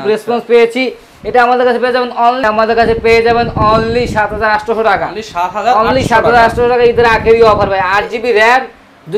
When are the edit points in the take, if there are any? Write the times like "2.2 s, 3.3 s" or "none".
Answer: 2.4 s